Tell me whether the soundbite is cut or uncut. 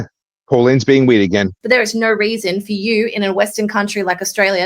cut